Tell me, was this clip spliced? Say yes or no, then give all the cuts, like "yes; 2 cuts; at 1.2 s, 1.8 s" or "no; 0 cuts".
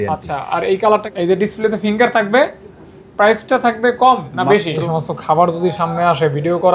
yes; 2 cuts; at 1.1 s, 4.7 s